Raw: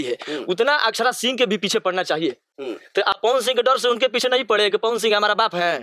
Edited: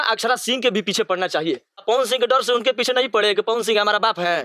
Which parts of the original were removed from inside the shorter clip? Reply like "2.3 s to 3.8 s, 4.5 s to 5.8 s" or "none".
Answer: 2.6 s to 3.2 s

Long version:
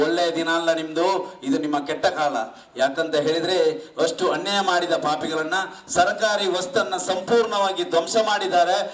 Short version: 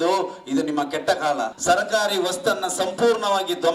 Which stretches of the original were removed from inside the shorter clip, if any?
2.5 s to 5.8 s

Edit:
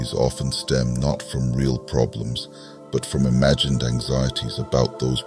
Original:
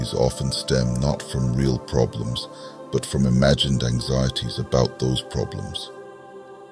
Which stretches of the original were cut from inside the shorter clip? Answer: none

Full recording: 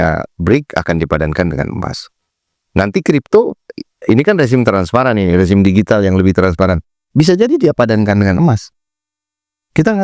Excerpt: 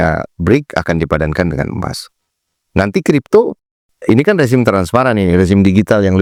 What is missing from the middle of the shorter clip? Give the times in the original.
none

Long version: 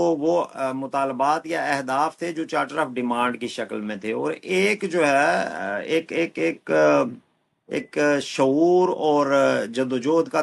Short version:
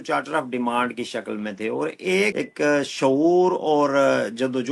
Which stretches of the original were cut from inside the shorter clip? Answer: 4.8 s to 7.7 s

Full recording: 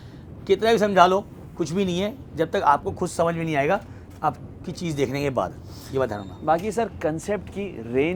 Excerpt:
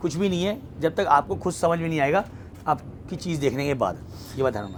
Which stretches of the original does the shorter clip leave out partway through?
none

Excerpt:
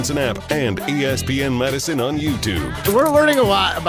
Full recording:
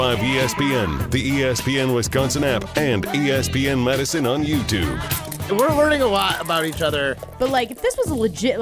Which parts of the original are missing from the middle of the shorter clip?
5.0 s to 5.4 s

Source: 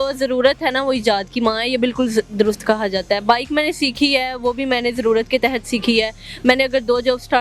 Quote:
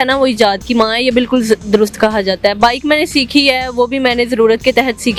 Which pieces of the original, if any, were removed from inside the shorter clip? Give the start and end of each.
none

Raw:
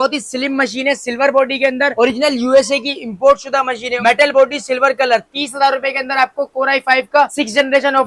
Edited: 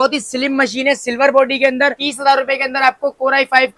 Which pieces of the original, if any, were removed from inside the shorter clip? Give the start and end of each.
1.9 s to 5.3 s

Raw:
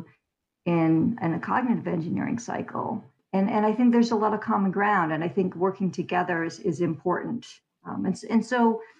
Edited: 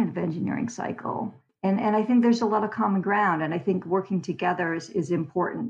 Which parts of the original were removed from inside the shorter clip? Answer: none

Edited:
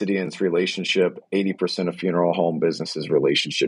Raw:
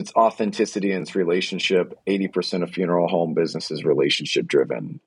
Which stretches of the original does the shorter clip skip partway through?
none

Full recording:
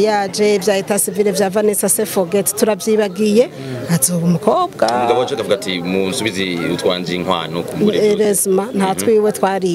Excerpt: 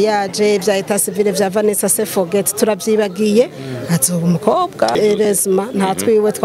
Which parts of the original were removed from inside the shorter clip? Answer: 4.9 s to 7.9 s

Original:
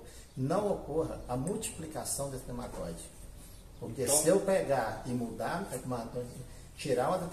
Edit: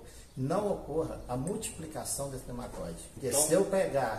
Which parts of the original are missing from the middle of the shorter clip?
3.2 s to 3.9 s

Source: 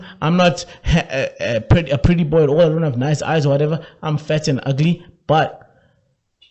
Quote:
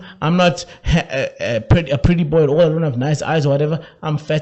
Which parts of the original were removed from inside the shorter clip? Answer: none

